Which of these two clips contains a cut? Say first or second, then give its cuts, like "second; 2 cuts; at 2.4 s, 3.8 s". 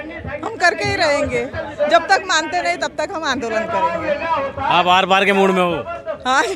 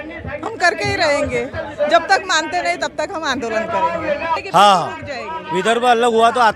second; 1 cut; at 4.4 s